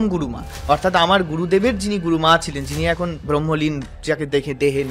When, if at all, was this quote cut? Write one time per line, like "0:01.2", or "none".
none